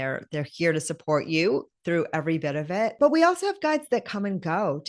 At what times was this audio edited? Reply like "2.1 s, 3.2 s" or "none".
2.9 s